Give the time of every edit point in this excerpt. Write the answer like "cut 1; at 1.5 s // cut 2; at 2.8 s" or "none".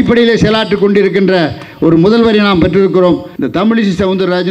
cut 1; at 3.3 s